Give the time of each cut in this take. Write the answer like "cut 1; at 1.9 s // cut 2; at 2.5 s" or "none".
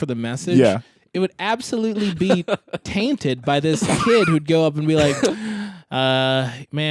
none